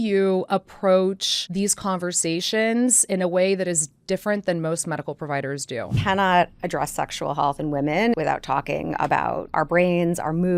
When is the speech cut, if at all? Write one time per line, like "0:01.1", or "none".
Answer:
0:01.3
0:06.0
0:08.2
0:09.5